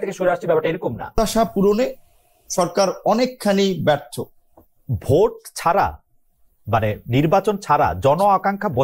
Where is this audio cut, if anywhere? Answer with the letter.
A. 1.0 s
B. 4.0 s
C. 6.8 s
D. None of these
A